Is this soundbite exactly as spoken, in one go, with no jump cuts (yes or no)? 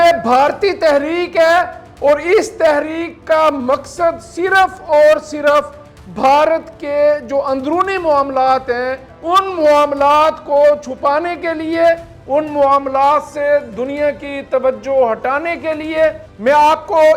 no